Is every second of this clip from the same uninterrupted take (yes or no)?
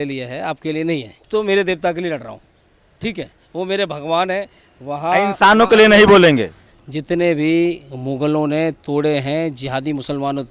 no